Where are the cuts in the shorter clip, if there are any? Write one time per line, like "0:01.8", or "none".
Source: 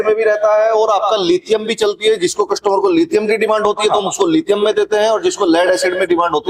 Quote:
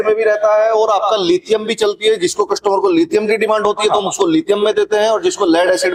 none